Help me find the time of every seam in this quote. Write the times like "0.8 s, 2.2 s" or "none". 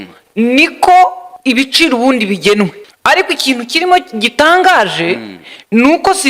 1.3 s, 2.9 s